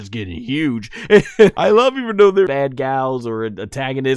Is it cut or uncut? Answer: cut